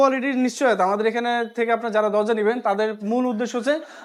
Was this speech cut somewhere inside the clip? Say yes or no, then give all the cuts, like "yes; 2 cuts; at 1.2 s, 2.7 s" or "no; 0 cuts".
no; 0 cuts